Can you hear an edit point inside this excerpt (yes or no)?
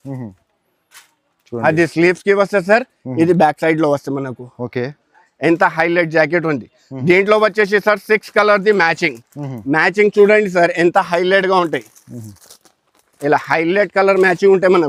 no